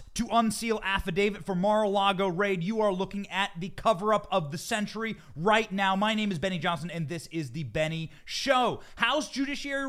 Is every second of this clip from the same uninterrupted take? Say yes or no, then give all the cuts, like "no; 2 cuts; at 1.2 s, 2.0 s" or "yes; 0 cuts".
yes; 0 cuts